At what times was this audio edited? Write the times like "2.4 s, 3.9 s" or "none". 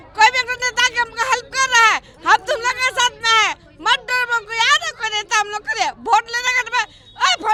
none